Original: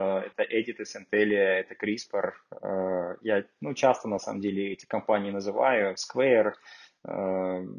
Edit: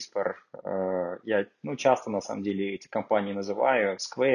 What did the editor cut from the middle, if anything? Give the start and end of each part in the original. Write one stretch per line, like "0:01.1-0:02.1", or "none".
none